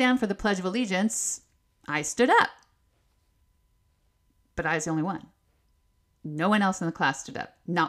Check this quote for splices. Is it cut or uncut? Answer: uncut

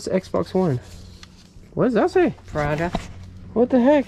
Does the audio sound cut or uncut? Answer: uncut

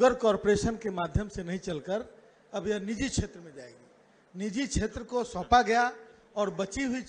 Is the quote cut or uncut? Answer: uncut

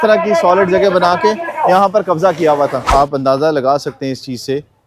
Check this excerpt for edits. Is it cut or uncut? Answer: cut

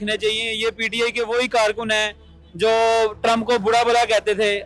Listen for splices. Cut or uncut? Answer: uncut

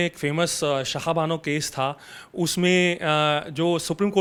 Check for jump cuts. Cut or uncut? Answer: uncut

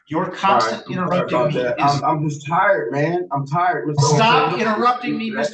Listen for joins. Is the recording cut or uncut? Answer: uncut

